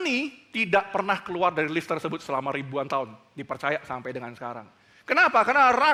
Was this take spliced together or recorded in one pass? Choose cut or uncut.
uncut